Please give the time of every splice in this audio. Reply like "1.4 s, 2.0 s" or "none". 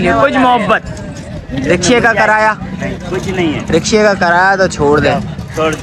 none